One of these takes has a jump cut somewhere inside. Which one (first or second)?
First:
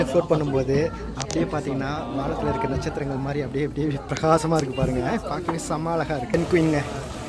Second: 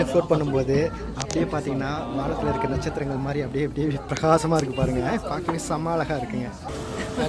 first